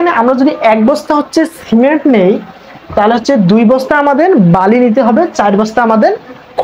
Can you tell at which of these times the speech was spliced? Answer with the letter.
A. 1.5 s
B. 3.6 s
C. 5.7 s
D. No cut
D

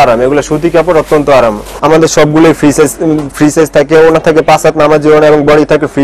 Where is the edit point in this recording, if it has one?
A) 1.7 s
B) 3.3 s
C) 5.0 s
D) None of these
A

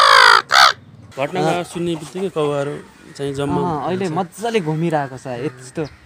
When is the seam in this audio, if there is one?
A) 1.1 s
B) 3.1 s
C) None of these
A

